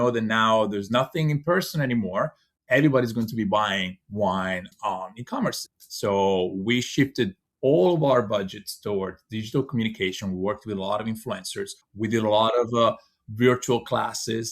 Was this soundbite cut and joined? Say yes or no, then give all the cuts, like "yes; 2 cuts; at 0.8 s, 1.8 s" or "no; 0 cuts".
yes; 1 cut; at 2.5 s